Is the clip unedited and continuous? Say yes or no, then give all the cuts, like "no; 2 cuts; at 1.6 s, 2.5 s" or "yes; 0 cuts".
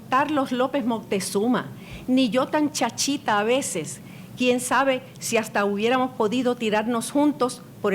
yes; 0 cuts